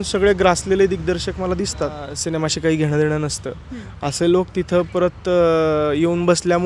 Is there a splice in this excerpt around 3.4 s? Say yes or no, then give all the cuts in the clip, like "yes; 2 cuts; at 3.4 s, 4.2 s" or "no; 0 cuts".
no; 1 cut; at 2.1 s